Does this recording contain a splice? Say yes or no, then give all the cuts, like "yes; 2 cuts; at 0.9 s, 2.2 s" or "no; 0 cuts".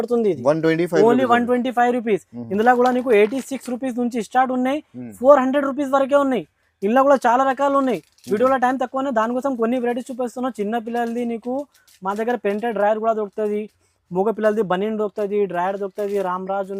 no; 0 cuts